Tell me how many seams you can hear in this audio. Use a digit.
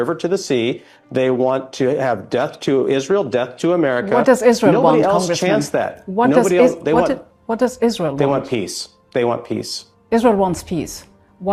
0